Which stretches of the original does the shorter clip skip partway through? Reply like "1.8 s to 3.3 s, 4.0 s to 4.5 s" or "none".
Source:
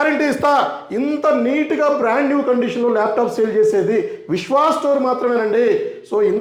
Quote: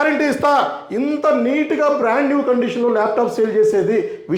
none